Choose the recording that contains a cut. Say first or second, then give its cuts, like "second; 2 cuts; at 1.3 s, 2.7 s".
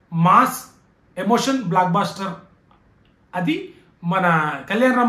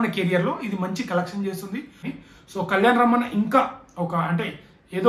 second; 1 cut; at 2.1 s